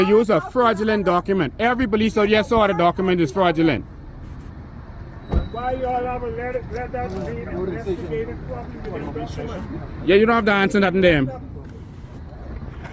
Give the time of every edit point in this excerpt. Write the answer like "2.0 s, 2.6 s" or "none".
1.8 s